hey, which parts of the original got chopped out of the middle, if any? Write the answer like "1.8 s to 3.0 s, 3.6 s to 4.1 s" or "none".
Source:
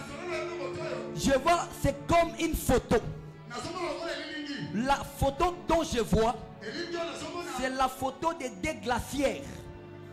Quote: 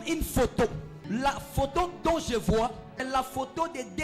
3.3 s to 4.6 s, 6.6 s to 7.7 s